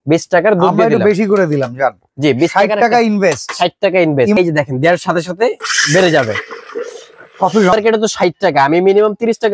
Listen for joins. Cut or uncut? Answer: cut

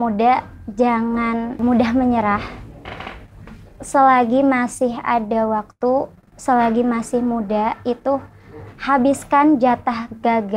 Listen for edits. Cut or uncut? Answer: cut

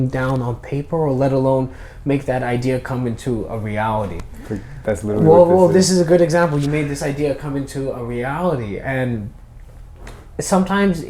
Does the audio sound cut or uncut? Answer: uncut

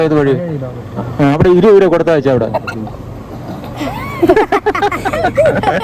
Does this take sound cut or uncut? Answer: uncut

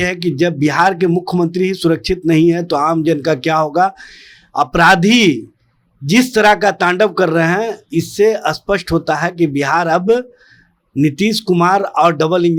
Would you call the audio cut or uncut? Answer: uncut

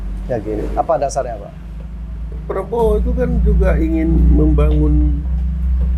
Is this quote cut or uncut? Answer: uncut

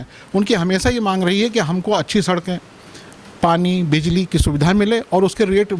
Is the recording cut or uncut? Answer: uncut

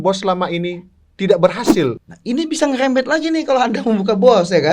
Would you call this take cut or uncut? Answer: cut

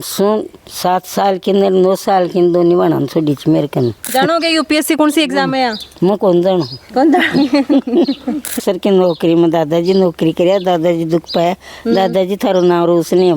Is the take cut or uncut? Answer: cut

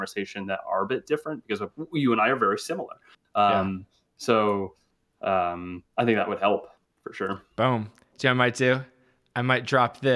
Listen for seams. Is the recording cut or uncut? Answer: uncut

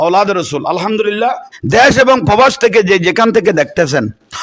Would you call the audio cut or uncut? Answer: cut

